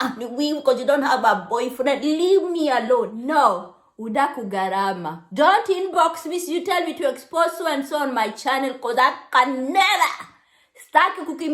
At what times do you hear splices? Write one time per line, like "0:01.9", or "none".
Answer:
0:03.2